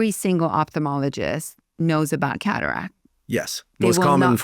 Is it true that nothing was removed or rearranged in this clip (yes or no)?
yes